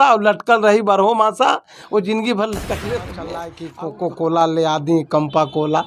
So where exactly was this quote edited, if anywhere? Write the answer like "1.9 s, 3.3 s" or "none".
3.6 s